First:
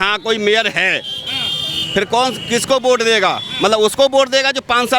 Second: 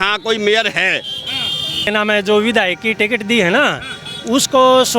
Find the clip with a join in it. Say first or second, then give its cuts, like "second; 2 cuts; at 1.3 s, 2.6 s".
second; 1 cut; at 1.9 s